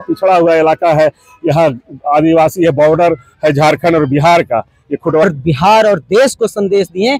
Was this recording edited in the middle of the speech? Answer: yes; 1 cut; at 5.2 s

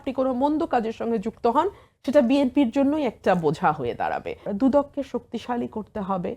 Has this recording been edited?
yes; 1 cut; at 4.4 s

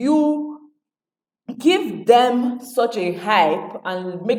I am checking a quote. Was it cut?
no; 0 cuts

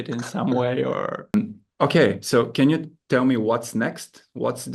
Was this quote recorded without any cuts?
no; 1 cut; at 1.3 s

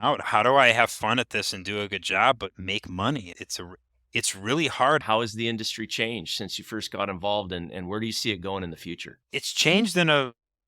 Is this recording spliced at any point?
yes; 2 cuts; at 5.0 s, 9.1 s

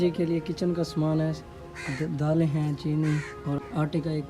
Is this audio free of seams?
yes; 0 cuts

